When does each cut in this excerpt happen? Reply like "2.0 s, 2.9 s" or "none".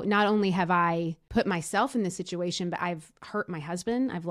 1.2 s